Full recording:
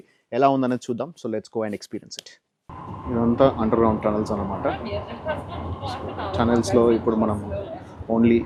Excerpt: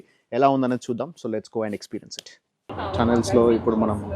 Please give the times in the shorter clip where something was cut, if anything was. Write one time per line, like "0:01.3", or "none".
0:02.7

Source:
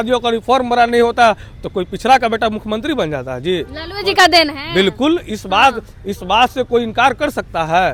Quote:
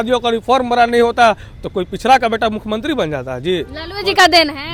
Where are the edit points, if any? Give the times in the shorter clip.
none

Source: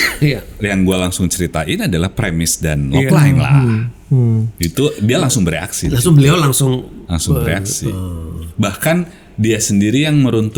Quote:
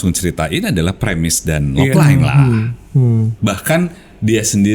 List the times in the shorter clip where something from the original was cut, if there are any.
0:03.3

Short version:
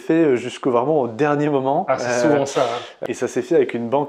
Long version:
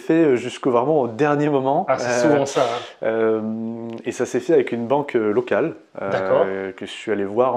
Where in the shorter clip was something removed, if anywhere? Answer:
0:02.9

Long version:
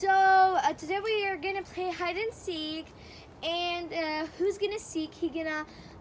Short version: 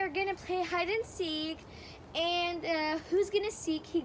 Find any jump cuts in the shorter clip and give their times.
none

